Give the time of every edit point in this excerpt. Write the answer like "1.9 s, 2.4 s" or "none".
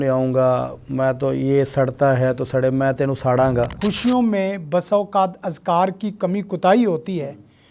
3.7 s